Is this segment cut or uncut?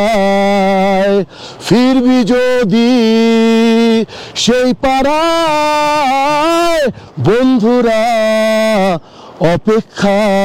uncut